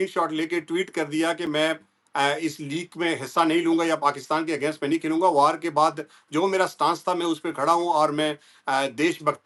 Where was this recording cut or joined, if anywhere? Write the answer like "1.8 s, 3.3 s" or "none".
none